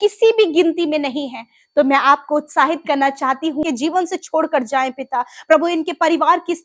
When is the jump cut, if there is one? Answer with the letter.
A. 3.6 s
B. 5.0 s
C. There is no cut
A